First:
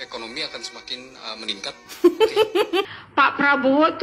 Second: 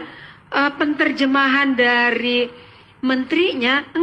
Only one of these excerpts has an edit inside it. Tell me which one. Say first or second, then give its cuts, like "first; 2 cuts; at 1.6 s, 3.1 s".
first; 1 cut; at 2.9 s